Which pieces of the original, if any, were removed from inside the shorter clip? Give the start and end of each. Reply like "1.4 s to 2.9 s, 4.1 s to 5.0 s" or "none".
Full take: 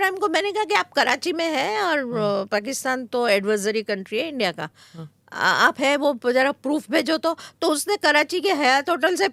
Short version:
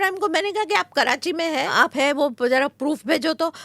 1.7 s to 5.5 s